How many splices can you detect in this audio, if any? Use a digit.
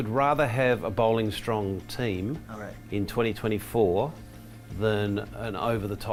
0